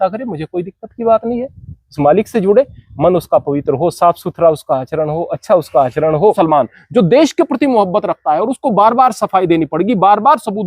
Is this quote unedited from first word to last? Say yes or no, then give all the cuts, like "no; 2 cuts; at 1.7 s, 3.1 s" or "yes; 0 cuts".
no; 1 cut; at 6.4 s